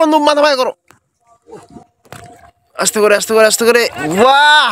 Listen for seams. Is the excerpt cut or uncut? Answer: cut